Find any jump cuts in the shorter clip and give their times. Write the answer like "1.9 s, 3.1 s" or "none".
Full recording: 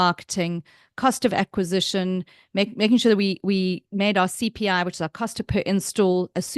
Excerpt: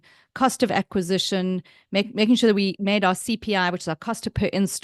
2.7 s